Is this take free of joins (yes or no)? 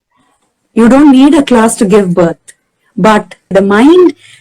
no